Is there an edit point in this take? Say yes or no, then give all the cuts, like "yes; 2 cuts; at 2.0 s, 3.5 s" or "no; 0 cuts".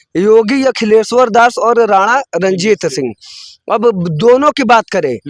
no; 0 cuts